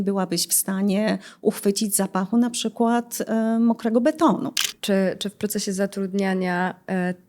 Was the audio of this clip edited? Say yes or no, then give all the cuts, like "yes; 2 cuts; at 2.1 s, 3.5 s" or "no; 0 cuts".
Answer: yes; 1 cut; at 4.7 s